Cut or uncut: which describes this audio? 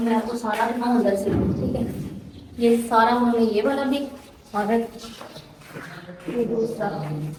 uncut